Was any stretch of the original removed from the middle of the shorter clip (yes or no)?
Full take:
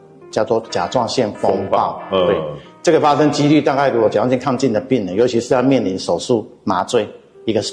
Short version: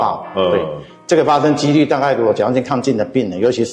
no